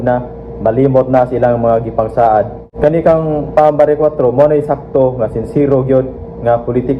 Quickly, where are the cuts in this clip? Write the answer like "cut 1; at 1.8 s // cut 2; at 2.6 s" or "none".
cut 1; at 2.6 s